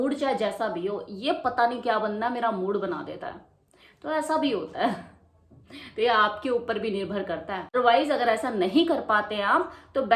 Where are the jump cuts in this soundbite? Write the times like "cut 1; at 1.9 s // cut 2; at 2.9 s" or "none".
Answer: cut 1; at 7.6 s